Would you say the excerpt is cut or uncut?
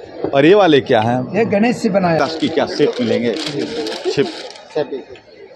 cut